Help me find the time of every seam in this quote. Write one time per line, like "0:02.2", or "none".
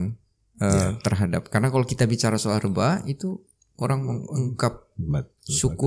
none

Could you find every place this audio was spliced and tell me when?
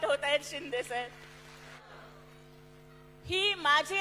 0:01.8

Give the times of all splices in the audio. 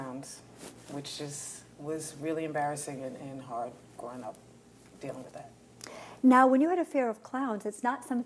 0:03.1

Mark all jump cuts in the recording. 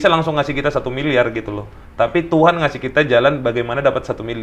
none

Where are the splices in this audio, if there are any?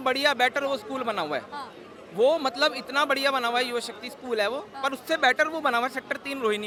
none

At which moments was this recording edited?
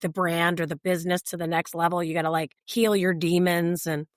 0:02.6

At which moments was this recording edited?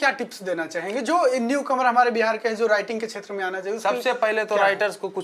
none

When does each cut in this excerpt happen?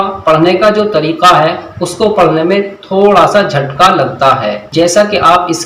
0:04.6

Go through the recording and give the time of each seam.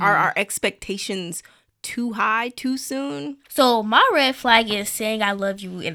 0:03.4

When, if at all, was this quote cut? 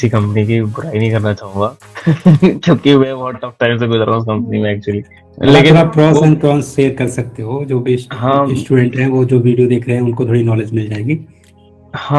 none

